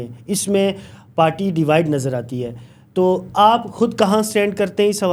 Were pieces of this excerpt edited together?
no; 0 cuts

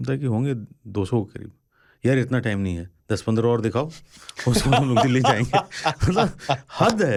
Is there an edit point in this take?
no; 0 cuts

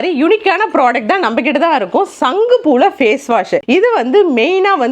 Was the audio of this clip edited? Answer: no; 0 cuts

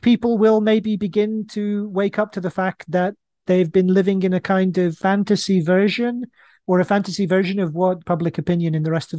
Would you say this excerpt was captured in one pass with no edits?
no; 2 cuts; at 4.9 s, 8.0 s

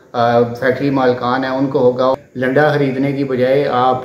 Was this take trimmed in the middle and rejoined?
yes; 1 cut; at 2.2 s

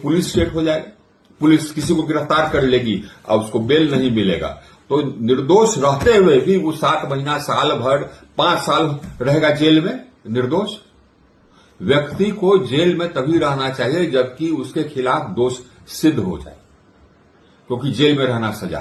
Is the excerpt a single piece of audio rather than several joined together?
yes; 0 cuts

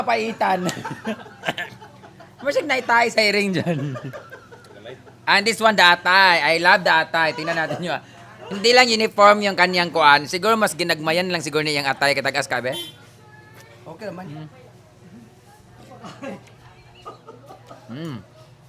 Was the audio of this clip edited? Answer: no; 0 cuts

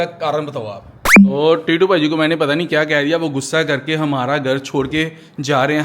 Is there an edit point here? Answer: yes; 1 cut; at 1.2 s

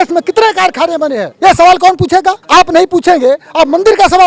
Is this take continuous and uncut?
no; 2 cuts; at 1.3 s, 2.4 s

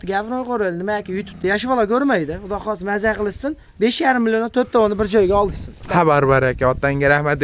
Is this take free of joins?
yes; 0 cuts

